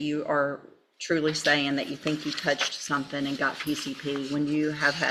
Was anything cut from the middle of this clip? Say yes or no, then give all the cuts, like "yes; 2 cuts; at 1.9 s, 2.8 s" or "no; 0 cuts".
no; 0 cuts